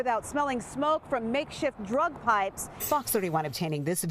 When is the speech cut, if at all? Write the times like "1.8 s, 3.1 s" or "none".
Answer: 2.8 s